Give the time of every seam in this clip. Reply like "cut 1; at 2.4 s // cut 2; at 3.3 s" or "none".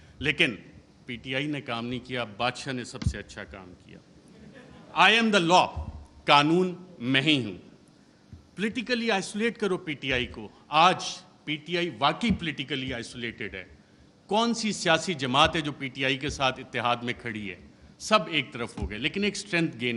none